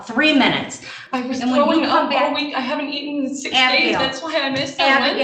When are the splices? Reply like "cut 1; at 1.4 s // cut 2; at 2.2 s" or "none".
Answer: cut 1; at 0.9 s